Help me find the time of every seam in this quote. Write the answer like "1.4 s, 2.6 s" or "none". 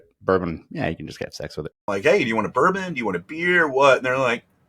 1.9 s